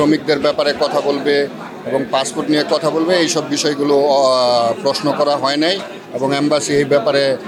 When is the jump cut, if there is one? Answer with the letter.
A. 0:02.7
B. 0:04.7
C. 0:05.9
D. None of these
D